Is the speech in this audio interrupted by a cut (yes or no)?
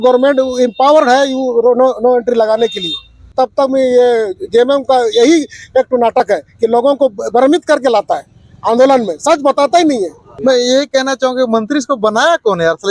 yes